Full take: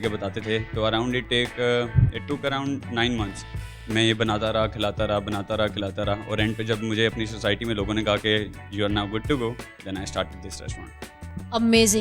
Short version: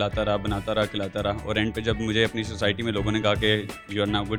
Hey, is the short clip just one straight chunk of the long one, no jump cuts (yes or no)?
yes